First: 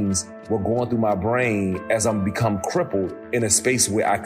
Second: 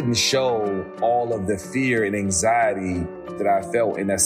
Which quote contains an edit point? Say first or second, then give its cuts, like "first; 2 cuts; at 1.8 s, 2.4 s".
second; 1 cut; at 3.2 s